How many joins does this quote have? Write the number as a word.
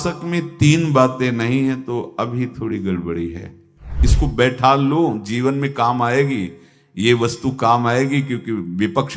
one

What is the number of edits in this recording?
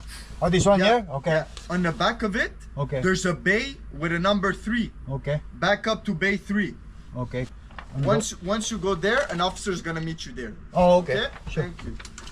one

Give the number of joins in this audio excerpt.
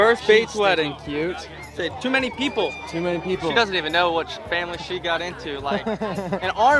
zero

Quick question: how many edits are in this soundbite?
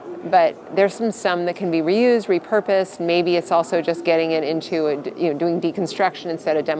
zero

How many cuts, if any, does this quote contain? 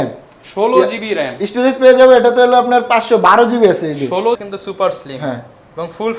one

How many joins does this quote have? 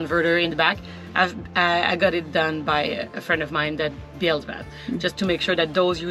zero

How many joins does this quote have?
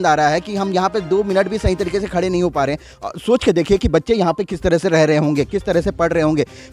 one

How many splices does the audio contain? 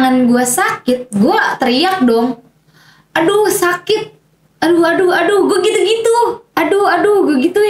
zero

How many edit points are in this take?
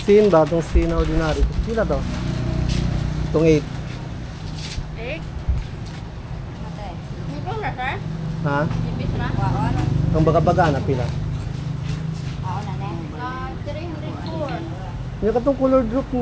zero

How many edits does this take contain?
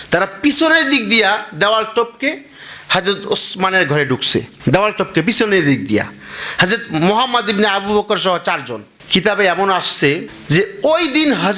two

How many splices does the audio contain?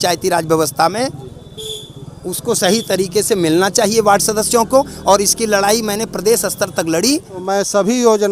one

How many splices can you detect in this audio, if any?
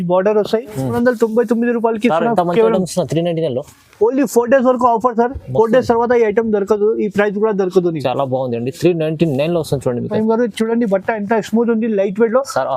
two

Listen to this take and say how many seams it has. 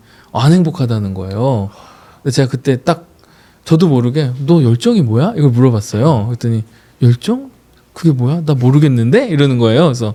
zero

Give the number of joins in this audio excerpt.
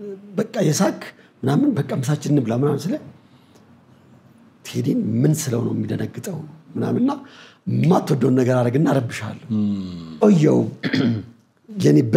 one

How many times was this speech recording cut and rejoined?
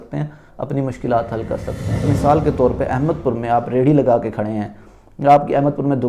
one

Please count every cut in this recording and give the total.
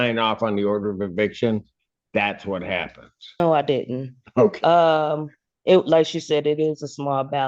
one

